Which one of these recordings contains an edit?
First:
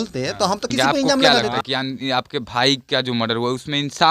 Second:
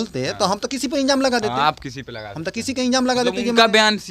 first; 1 cut; at 1.6 s

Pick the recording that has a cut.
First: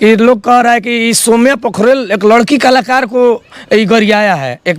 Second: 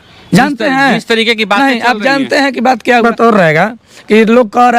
second; 1 cut; at 3.0 s

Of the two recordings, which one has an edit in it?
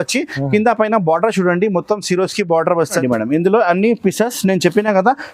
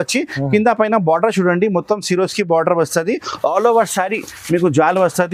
first; 1 cut; at 3.0 s

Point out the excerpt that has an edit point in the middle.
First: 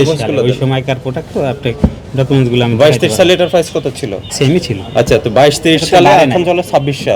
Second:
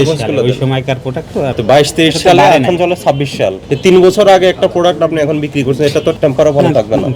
second; 2 cuts; at 1.6 s, 6.2 s

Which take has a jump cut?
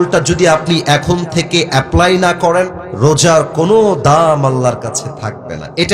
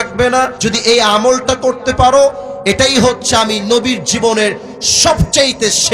first; 1 cut; at 2.8 s

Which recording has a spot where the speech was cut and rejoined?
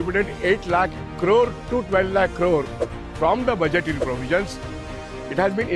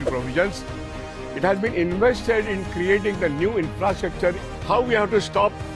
second; 1 cut; at 4.5 s

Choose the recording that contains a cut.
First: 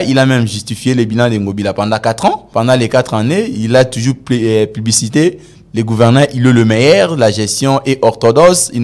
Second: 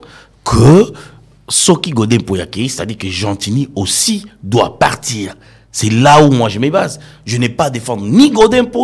first; 1 cut; at 2.4 s

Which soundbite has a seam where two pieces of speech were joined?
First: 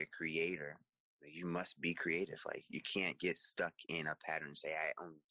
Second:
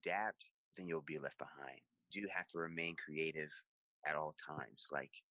second; 1 cut; at 2.0 s

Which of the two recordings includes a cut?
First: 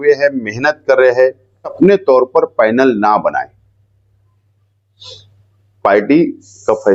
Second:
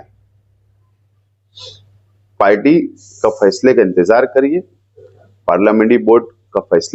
first; 1 cut; at 1.7 s

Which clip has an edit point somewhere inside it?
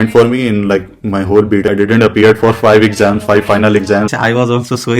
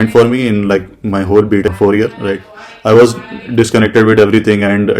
first; 2 cuts; at 1.7 s, 4.1 s

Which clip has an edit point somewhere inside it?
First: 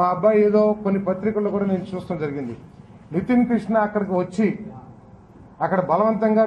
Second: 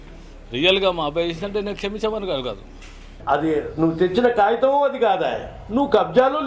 second; 1 cut; at 3.2 s

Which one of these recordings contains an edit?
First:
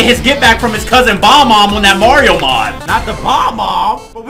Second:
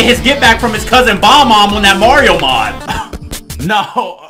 first; 1 cut; at 2.8 s

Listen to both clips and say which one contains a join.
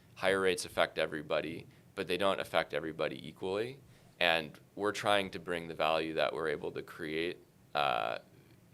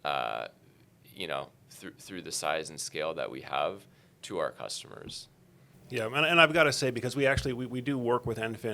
second; 1 cut; at 5.7 s

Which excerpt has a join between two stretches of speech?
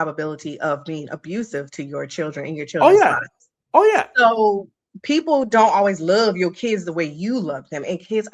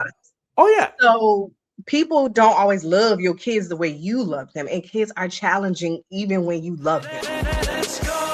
second; 1 cut; at 7.1 s

